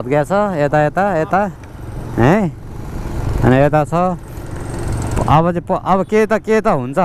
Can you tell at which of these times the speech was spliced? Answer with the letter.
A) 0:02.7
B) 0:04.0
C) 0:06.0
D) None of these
D